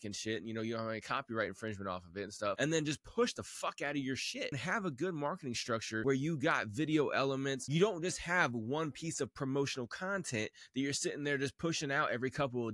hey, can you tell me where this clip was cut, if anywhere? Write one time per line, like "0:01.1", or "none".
0:02.6
0:04.6
0:06.0
0:07.6

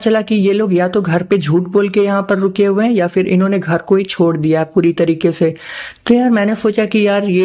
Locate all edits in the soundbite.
none

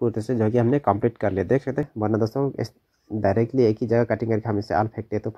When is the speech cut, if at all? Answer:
0:01.9

